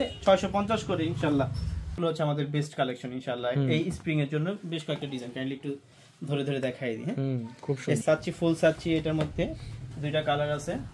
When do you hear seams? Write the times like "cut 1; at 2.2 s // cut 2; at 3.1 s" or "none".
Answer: cut 1; at 1.9 s // cut 2; at 8.0 s